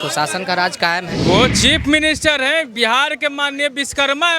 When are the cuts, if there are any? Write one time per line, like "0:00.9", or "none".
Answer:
0:01.2